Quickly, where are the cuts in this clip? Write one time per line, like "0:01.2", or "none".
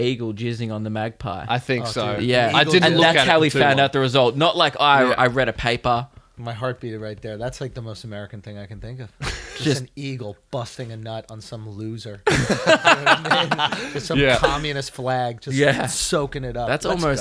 none

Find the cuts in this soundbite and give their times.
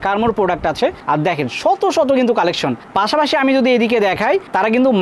none

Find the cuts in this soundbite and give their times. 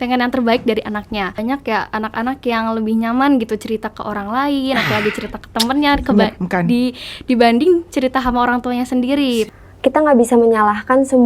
0:01.4
0:09.5

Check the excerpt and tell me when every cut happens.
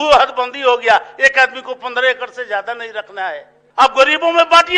0:03.6

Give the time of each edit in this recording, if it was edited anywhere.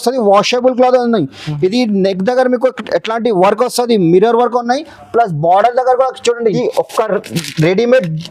0:06.6

